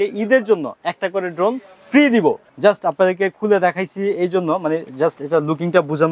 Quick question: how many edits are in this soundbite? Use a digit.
1